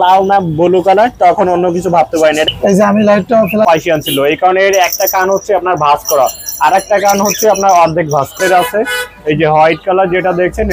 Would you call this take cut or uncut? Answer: cut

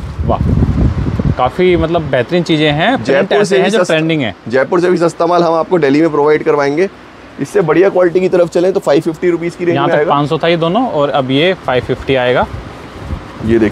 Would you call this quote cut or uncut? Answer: uncut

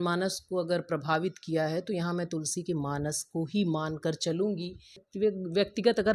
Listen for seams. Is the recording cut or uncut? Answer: cut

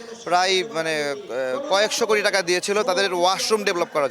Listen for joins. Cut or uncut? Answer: uncut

